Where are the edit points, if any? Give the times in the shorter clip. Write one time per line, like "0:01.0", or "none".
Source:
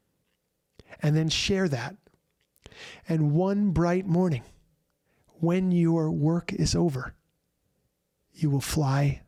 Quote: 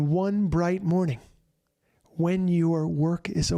none